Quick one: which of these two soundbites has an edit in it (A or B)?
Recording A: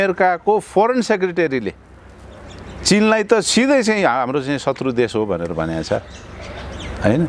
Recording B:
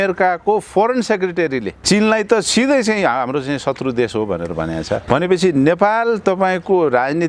B